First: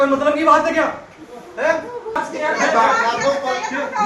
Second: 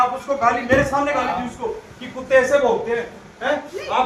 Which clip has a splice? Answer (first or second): first